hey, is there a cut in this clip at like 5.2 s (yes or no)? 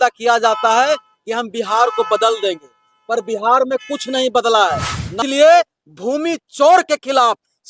yes